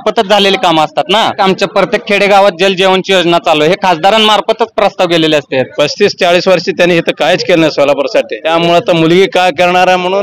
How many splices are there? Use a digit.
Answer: 3